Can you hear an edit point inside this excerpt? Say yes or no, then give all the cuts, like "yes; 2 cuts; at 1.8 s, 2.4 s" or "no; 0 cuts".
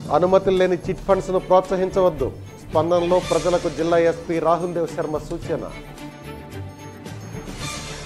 no; 0 cuts